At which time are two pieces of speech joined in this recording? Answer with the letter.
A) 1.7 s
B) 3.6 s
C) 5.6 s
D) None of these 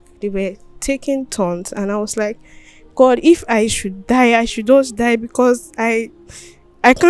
D